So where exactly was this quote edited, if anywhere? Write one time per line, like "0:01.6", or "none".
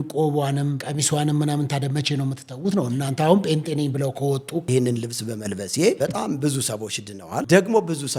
0:00.8
0:04.7
0:06.0
0:07.5